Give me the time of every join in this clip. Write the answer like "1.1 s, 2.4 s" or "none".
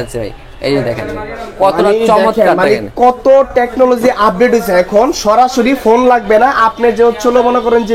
none